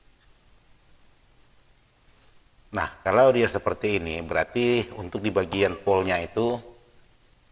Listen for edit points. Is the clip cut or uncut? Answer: uncut